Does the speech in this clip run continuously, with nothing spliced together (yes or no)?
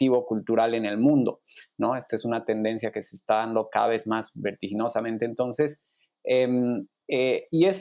yes